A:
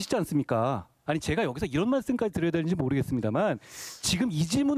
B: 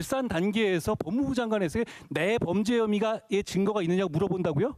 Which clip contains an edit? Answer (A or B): A